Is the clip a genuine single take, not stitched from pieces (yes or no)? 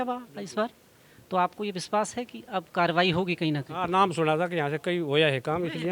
yes